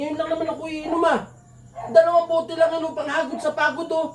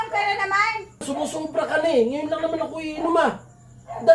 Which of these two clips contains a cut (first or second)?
second